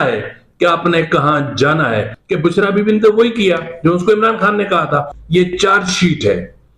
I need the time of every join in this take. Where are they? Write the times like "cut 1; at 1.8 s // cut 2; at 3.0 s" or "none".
cut 1; at 2.2 s // cut 2; at 5.2 s